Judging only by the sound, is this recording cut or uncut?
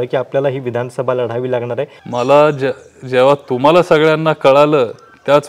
cut